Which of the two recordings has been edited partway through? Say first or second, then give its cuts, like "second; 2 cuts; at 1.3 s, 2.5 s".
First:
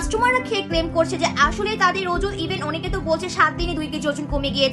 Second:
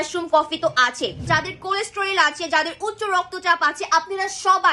second; 1 cut; at 1.2 s